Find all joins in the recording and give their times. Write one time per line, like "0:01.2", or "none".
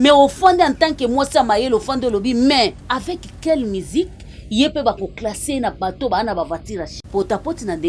0:02.8
0:07.0